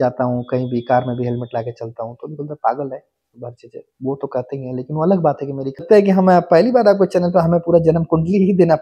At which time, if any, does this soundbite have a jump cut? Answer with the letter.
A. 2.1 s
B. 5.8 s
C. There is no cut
B